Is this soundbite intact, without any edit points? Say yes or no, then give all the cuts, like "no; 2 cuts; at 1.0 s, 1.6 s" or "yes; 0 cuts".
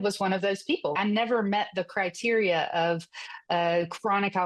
no; 1 cut; at 1.0 s